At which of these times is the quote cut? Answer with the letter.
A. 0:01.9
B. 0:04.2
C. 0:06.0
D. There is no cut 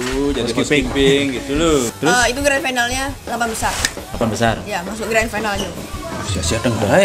A